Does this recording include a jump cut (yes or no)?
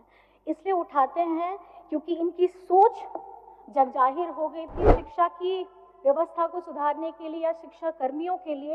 yes